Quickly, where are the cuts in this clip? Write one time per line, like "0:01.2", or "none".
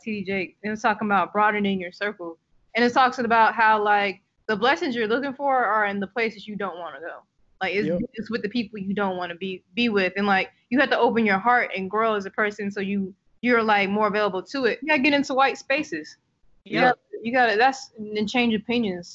0:14.8